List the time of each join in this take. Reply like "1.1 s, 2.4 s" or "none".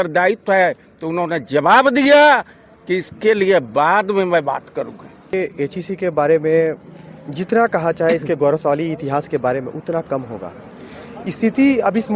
5.3 s